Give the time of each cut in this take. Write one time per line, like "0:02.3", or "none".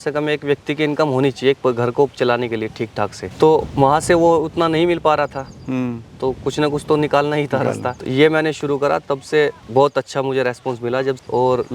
none